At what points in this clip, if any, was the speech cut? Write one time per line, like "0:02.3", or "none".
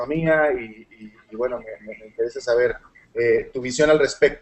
0:03.5